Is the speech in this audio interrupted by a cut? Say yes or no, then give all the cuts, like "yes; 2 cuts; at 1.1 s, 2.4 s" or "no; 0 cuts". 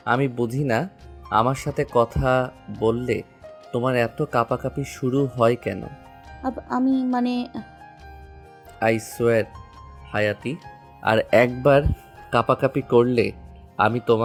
no; 0 cuts